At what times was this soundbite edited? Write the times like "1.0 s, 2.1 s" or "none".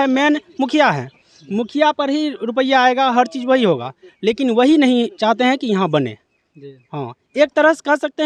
none